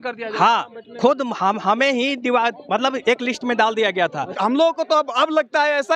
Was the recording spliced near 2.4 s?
no; 1 cut; at 4.3 s

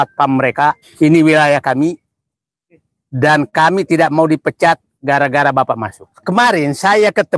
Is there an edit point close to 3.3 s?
no; 2 cuts; at 0.9 s, 6.2 s

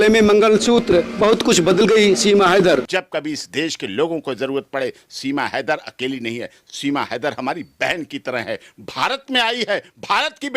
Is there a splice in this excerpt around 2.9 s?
yes; 1 cut; at 2.9 s

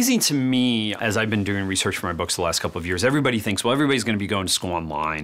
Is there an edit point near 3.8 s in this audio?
no; 1 cut; at 1.0 s

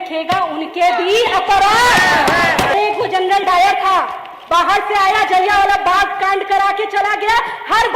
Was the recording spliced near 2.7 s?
yes; 1 cut; at 2.7 s

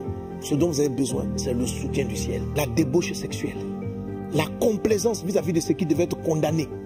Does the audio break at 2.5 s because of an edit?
yes; 1 cut; at 2.5 s

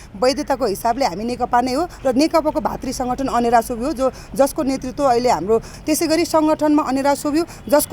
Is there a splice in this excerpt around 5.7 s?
yes; 1 cut; at 5.7 s

